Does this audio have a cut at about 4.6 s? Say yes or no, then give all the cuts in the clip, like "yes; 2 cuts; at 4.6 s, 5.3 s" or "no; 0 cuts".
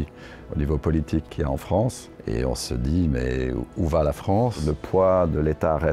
yes; 3 cuts; at 1.3 s, 2.1 s, 4.6 s